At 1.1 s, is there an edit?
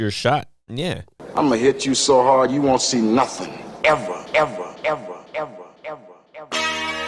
yes; 1 cut; at 1.1 s

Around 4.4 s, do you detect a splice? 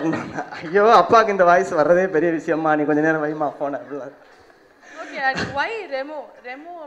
no; 0 cuts

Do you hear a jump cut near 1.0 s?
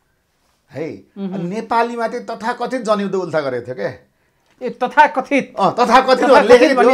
no; 0 cuts

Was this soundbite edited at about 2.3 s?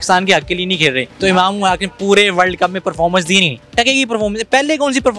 no; 2 cuts; at 1.1 s, 3.6 s

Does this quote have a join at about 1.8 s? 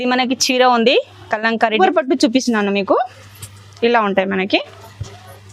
yes; 1 cut; at 1.8 s

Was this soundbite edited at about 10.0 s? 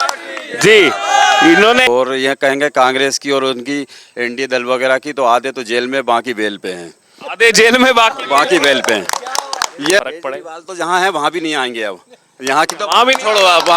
yes; 2 cuts; at 1.8 s, 10.0 s

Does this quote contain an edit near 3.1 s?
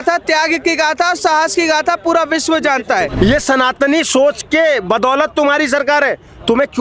yes; 1 cut; at 3.1 s

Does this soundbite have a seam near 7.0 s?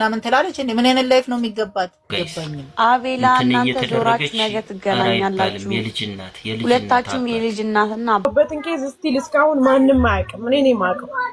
no; 2 cuts; at 2.2 s, 8.2 s

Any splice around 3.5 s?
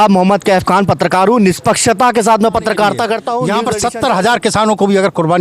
yes; 1 cut; at 3.5 s

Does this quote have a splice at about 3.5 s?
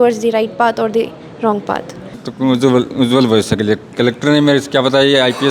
no; 1 cut; at 2.3 s

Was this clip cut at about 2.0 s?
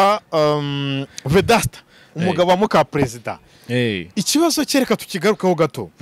no; 0 cuts

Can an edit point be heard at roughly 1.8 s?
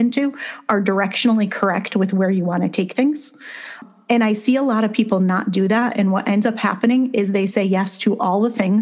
no; 1 cut; at 3.5 s

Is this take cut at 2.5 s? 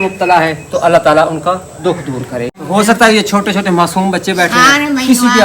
yes; 1 cut; at 2.5 s

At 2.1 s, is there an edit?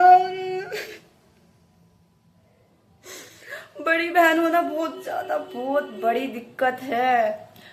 no; 0 cuts

